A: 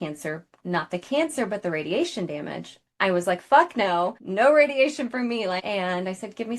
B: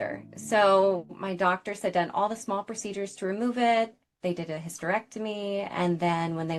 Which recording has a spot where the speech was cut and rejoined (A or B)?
A